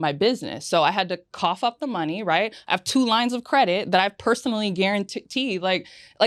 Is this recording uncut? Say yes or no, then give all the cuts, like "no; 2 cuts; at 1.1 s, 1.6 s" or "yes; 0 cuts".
yes; 0 cuts